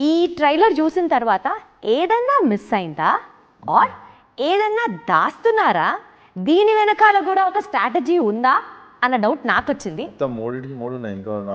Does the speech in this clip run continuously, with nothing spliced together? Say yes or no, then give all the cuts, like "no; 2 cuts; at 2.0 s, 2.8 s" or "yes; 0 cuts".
yes; 0 cuts